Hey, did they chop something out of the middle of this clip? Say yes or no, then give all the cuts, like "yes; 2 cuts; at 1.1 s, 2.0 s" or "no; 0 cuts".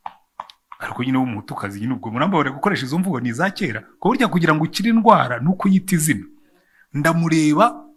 no; 0 cuts